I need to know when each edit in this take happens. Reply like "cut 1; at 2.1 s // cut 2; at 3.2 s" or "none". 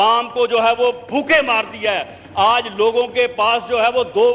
none